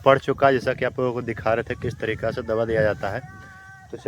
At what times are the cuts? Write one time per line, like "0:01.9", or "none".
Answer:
none